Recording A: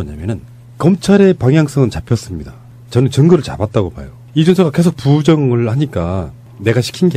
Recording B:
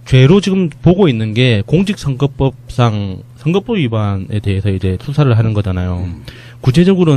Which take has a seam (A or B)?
B